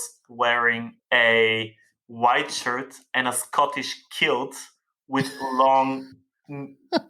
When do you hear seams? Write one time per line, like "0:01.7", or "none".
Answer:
0:00.9